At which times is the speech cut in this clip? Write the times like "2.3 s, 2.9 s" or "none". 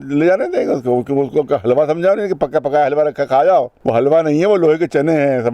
3.8 s